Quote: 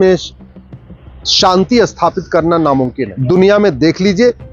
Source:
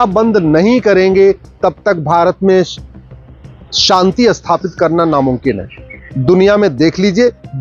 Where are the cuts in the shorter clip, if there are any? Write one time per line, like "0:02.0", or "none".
0:03.1